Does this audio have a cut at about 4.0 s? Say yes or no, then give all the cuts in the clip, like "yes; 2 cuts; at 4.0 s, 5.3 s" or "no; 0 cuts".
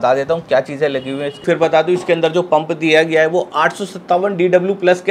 no; 1 cut; at 1.4 s